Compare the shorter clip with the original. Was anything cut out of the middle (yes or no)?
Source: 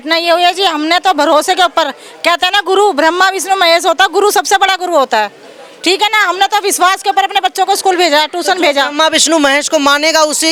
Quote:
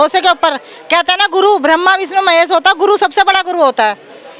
no